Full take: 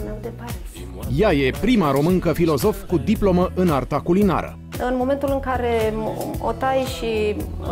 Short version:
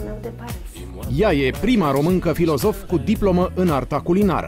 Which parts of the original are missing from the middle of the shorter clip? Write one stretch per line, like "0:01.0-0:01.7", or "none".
none